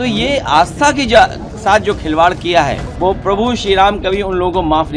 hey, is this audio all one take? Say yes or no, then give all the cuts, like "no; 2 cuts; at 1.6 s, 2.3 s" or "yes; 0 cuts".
no; 1 cut; at 2.9 s